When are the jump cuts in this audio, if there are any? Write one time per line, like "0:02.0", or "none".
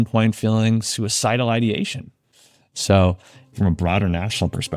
0:02.3